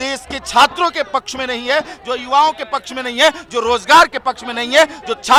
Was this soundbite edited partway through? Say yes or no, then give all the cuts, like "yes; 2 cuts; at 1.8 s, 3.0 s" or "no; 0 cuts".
no; 0 cuts